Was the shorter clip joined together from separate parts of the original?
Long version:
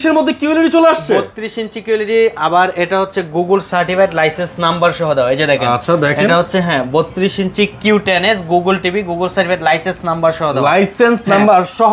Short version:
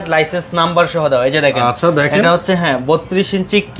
no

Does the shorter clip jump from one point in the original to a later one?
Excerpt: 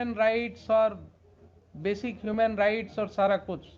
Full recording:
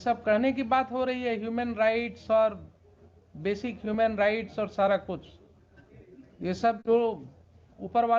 no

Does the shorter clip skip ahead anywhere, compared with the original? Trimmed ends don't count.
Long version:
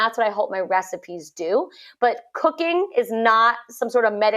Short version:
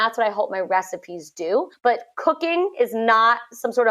yes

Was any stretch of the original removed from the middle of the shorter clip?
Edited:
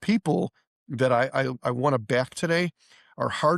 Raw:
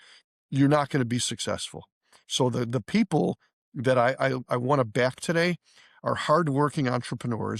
no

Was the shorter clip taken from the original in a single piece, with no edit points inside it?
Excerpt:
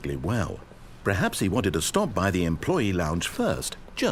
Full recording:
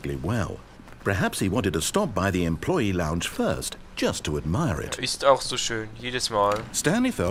yes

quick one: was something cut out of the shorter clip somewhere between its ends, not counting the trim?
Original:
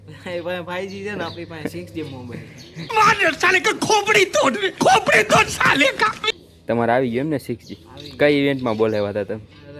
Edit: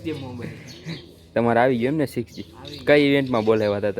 yes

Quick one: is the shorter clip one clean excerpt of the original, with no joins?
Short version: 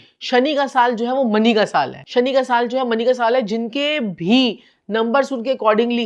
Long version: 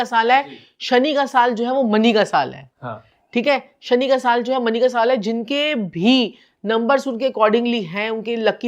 no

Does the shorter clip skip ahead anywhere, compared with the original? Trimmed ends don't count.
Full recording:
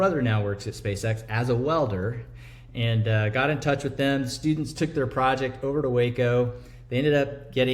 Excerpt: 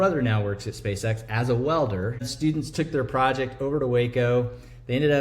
yes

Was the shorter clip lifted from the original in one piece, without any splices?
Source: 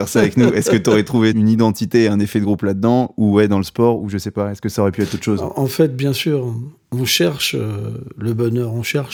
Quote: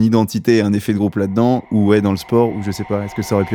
yes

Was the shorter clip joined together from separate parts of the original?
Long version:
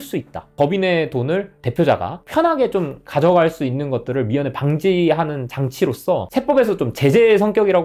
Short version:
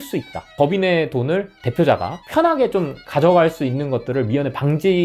no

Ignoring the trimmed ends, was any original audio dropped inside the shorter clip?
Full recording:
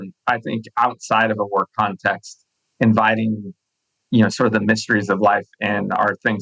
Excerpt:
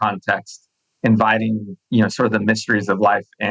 yes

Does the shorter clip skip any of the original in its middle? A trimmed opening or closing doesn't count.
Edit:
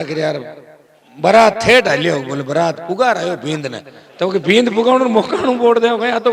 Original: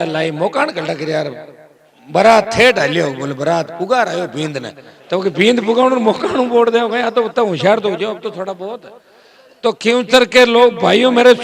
no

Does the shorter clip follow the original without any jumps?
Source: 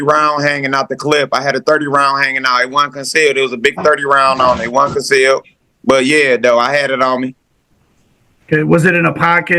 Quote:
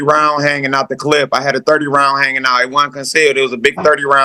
yes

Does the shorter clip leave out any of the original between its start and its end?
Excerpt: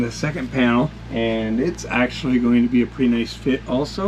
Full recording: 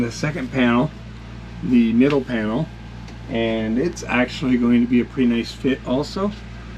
yes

